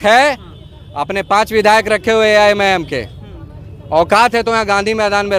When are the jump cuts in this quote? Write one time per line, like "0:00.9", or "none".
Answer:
none